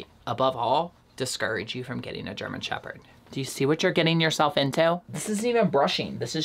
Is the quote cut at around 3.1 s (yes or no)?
yes